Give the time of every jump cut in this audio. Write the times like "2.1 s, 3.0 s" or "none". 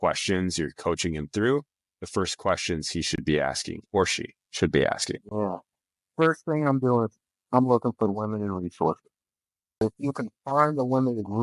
9.8 s